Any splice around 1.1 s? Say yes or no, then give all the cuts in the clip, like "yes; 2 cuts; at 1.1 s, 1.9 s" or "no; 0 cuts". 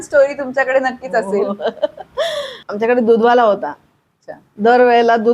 no; 1 cut; at 2.6 s